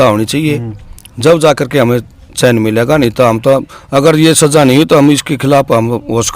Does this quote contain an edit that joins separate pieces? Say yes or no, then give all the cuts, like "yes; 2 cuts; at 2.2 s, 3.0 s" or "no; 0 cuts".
no; 0 cuts